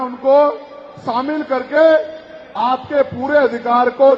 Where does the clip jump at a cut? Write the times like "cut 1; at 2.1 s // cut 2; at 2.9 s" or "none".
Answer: none